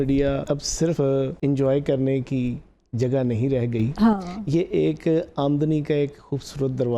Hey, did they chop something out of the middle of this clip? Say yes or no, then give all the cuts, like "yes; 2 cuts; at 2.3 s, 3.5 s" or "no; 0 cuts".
yes; 1 cut; at 1.0 s